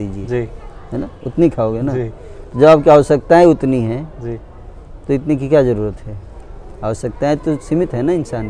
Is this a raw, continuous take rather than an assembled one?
yes; 0 cuts

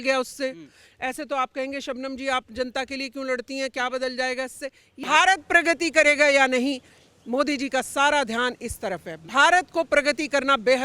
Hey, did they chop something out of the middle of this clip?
yes; 1 cut; at 5.0 s

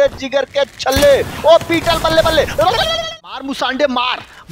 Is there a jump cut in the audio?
yes; 1 cut; at 3.0 s

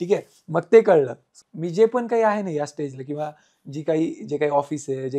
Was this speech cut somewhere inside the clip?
yes; 1 cut; at 1.3 s

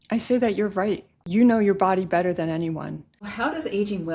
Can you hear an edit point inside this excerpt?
yes; 2 cuts; at 1.1 s, 3.3 s

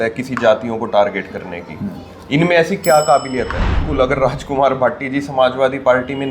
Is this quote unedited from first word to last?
no; 1 cut; at 3.8 s

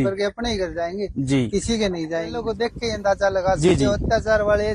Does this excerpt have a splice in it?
yes; 1 cut; at 2.3 s

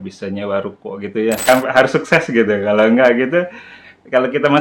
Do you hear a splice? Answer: yes; 1 cut; at 1.4 s

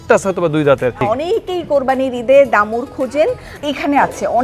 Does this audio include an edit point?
yes; 2 cuts; at 1.0 s, 3.5 s

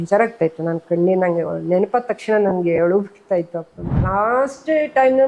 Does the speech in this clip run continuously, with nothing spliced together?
no; 1 cut; at 3.9 s

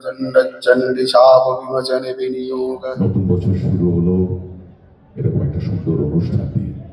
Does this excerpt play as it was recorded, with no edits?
no; 1 cut; at 2.8 s

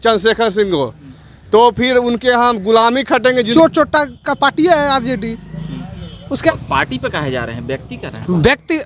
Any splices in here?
yes; 2 cuts; at 3.5 s, 6.5 s

